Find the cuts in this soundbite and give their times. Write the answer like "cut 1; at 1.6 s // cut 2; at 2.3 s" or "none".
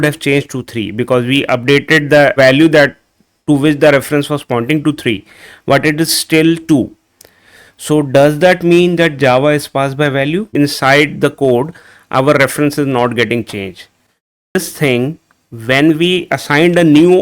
cut 1; at 10.5 s // cut 2; at 14.6 s